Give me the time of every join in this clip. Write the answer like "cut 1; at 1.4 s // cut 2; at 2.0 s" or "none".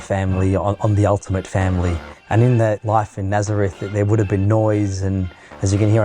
cut 1; at 2.1 s // cut 2; at 2.8 s